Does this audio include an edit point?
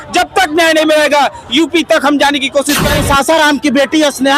yes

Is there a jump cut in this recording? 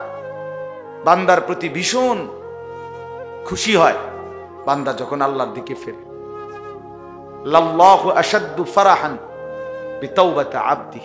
yes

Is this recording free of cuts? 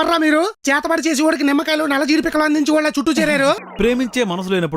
no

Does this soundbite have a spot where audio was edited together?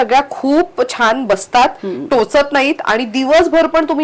no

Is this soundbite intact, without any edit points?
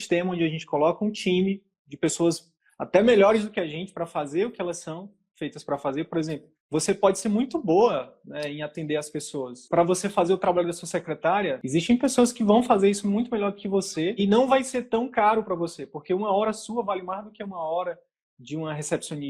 no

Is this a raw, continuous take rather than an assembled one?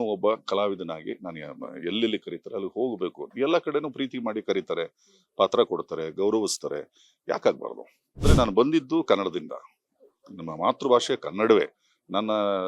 no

